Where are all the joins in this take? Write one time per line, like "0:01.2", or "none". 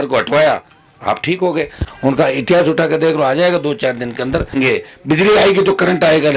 0:01.8
0:04.5